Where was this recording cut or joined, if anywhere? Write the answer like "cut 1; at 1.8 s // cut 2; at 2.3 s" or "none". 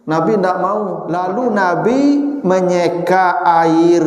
cut 1; at 1.0 s